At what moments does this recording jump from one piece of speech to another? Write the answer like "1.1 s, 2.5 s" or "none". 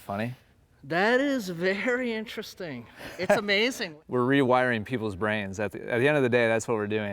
3.9 s